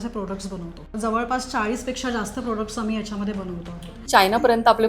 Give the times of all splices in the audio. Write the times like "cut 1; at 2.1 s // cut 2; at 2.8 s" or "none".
cut 1; at 0.9 s // cut 2; at 4.0 s